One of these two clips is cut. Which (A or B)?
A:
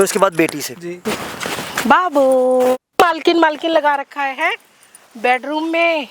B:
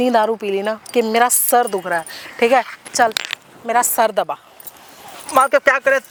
A